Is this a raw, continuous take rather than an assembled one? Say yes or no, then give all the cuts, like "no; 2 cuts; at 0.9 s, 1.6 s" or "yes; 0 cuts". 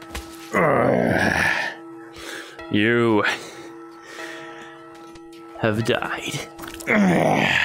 yes; 0 cuts